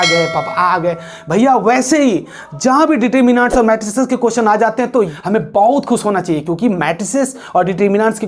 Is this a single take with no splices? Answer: no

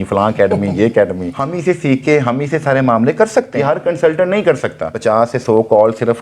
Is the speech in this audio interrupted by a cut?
yes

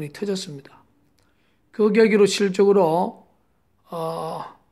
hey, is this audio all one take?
yes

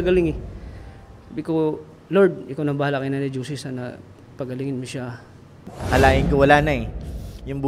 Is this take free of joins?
no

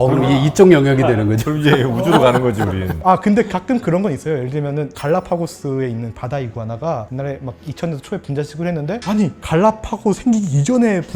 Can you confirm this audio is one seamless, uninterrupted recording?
yes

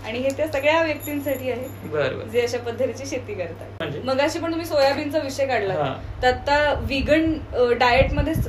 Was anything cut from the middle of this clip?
yes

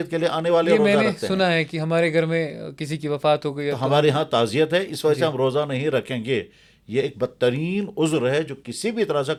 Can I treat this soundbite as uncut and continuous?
yes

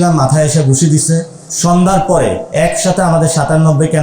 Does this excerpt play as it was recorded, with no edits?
no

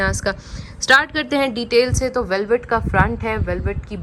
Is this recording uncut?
yes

